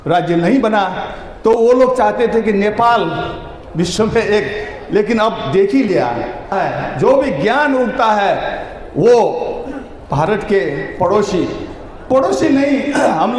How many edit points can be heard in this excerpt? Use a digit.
1